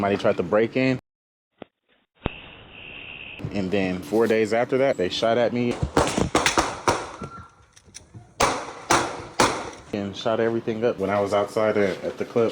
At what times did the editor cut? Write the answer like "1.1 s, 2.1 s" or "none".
4.0 s, 5.0 s